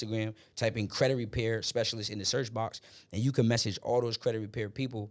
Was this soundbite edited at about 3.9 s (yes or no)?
no